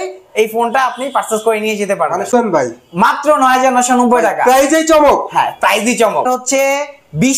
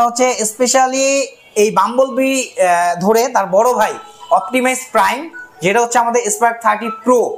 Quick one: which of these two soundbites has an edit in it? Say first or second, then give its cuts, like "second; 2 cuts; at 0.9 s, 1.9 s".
first; 2 cuts; at 2.3 s, 6.2 s